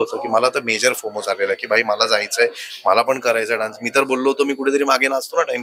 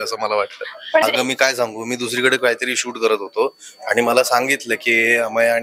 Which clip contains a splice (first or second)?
second